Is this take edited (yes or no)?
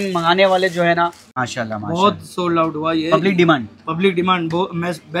yes